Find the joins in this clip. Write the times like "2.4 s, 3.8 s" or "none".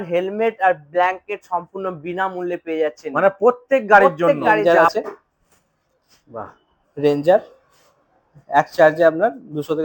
4.6 s